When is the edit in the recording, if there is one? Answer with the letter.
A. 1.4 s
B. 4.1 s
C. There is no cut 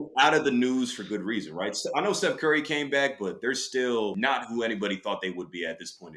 B